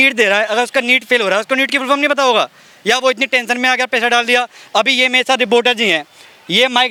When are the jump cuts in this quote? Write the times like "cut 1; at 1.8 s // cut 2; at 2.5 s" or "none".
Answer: none